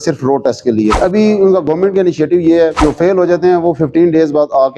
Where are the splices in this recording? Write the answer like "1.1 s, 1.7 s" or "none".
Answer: 1.0 s, 2.8 s